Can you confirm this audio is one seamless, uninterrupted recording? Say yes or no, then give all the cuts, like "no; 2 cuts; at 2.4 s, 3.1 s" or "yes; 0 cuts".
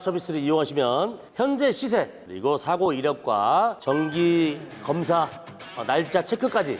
no; 2 cuts; at 2.2 s, 3.8 s